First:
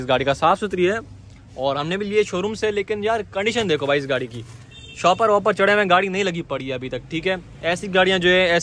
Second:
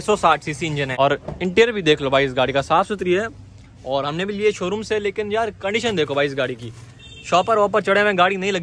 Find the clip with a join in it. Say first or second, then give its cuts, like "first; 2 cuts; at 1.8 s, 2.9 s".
second; 1 cut; at 0.9 s